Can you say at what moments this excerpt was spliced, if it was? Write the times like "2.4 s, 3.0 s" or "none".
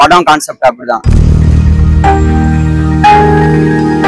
1.0 s